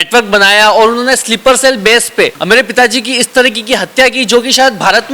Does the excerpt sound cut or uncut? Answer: cut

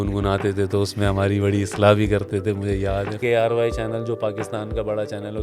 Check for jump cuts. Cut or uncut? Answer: cut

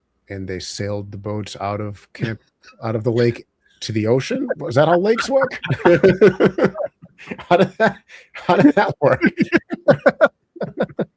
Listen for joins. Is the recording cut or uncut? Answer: uncut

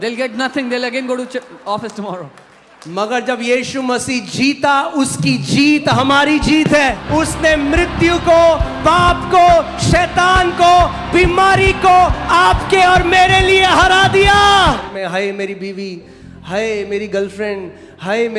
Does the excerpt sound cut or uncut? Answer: cut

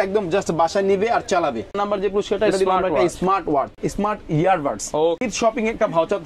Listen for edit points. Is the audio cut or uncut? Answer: cut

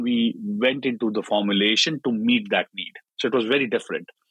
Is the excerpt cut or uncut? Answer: uncut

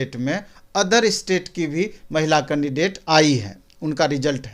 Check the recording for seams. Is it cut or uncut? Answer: uncut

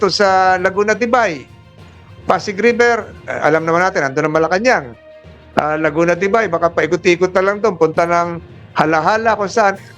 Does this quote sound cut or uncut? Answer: uncut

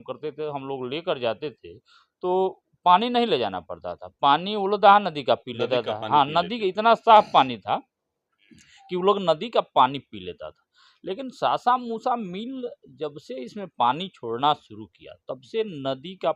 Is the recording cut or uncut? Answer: uncut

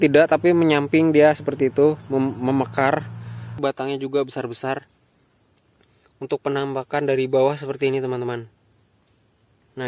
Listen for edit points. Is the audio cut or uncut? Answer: cut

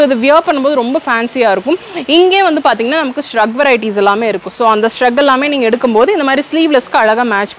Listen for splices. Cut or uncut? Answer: uncut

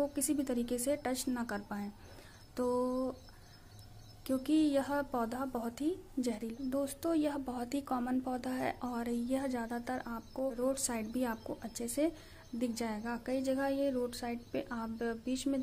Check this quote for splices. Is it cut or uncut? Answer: cut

